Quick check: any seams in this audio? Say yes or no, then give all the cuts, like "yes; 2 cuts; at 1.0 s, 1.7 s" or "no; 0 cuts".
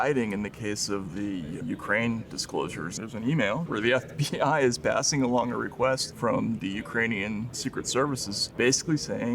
yes; 5 cuts; at 2.9 s, 4.1 s, 6.1 s, 7.6 s, 8.4 s